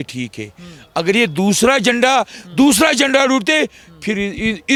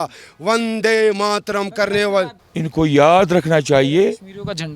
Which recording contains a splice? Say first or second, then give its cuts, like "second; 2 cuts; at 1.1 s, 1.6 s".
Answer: second; 1 cut; at 2.4 s